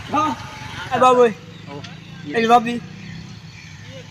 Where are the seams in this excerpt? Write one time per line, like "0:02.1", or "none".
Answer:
0:01.0

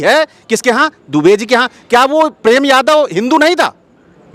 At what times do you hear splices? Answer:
none

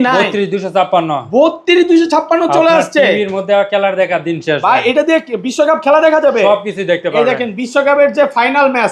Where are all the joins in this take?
none

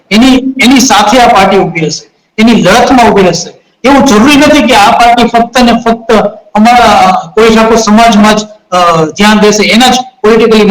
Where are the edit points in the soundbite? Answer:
none

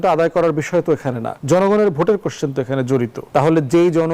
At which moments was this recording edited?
0:01.3
0:03.2

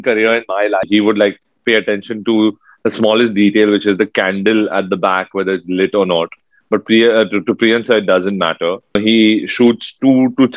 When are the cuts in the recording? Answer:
0:00.9
0:09.0

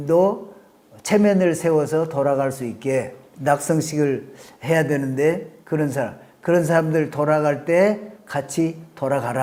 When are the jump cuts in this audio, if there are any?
none

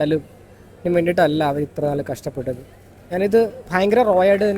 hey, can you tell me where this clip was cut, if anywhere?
none

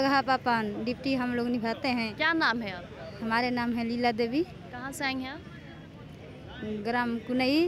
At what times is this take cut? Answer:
none

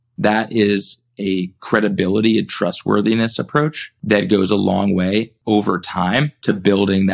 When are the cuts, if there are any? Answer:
0:03.9
0:05.3
0:06.3

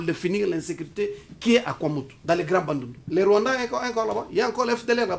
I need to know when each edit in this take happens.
0:02.1
0:03.0

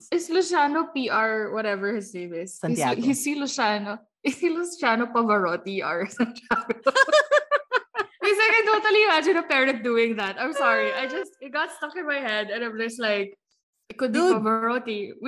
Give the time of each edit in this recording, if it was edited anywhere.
none

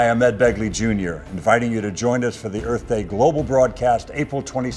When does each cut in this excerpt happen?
none

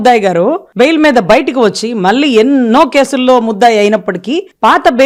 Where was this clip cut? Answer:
none

